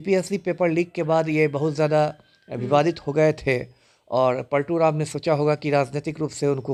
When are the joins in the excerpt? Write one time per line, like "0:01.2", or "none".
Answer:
none